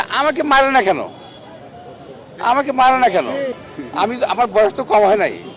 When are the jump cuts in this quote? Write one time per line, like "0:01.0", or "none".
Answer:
0:03.6